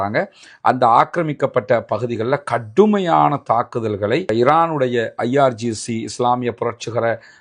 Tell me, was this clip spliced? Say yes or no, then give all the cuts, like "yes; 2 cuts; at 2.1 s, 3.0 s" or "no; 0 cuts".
no; 0 cuts